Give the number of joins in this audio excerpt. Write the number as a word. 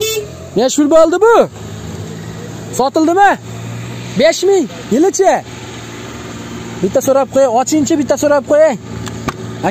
zero